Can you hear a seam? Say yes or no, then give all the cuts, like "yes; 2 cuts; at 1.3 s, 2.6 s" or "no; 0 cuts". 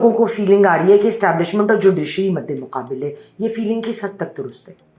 no; 0 cuts